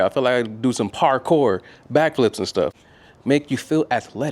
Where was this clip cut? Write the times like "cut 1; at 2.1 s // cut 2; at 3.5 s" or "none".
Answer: cut 1; at 2.9 s